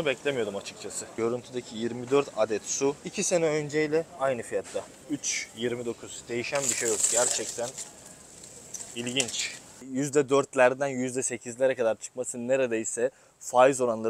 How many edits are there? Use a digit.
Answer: 3